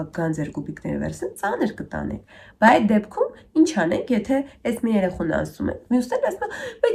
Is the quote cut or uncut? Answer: uncut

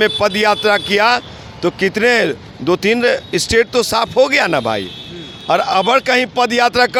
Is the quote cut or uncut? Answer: uncut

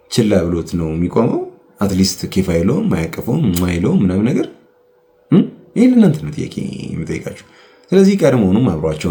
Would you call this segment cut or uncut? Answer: uncut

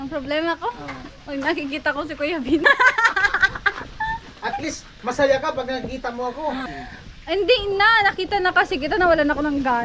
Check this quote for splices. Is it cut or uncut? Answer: cut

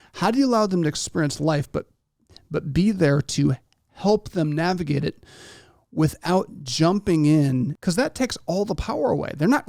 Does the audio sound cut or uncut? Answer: cut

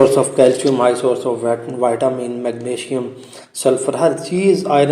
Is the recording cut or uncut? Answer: uncut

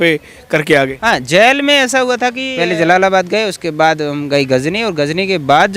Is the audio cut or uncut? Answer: cut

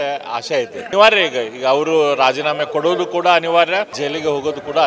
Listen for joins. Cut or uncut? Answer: cut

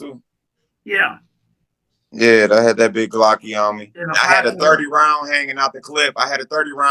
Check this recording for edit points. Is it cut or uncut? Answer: cut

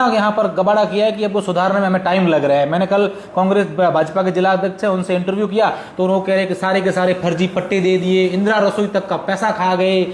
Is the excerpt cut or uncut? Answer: uncut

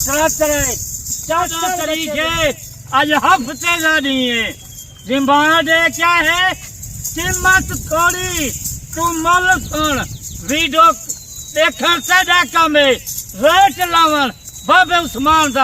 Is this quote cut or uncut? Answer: cut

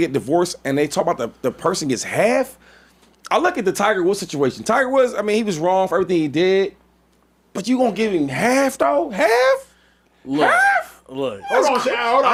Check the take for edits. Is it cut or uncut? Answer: uncut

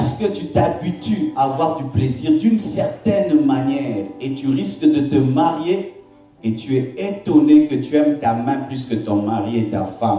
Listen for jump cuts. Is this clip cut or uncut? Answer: uncut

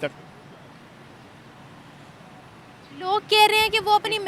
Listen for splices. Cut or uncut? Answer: uncut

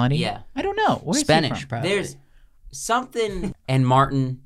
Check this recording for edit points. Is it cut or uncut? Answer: cut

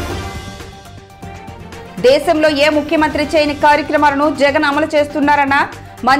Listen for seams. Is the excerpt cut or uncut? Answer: uncut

